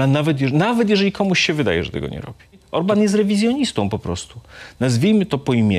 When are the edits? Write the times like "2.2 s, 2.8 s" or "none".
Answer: 2.7 s